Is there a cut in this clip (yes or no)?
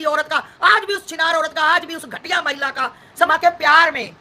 yes